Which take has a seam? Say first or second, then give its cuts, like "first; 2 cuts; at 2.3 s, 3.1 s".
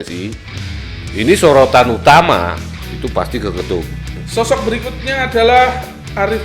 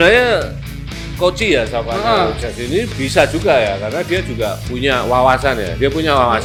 first; 1 cut; at 4.2 s